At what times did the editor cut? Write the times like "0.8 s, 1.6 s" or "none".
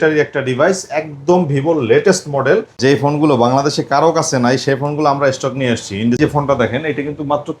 2.8 s, 6.2 s